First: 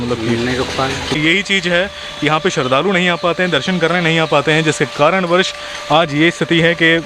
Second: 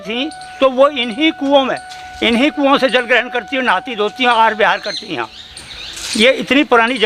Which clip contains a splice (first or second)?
first